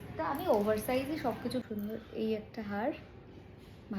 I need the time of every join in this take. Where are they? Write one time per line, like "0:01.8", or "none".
0:01.6